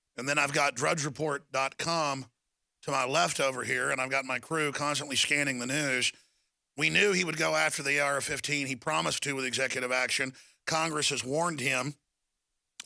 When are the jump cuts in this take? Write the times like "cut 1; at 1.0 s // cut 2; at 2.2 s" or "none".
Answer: cut 1; at 5.6 s